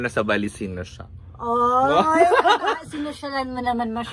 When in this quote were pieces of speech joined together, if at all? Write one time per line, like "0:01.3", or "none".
none